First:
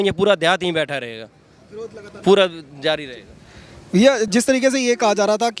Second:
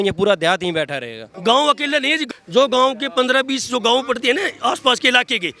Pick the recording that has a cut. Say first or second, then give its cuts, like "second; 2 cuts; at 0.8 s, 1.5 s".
second; 2 cuts; at 1.2 s, 2.2 s